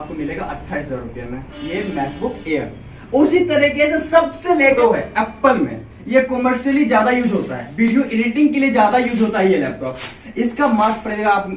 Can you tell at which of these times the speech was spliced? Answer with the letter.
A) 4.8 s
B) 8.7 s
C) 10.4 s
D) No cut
A